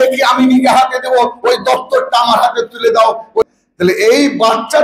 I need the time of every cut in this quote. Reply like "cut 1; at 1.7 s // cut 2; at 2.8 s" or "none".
cut 1; at 3.4 s